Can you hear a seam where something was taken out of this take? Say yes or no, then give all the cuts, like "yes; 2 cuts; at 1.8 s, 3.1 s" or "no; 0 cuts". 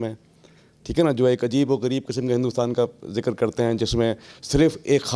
no; 0 cuts